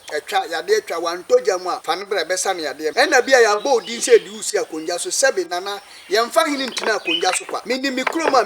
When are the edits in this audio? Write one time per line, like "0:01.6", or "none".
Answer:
0:01.8
0:02.9
0:07.6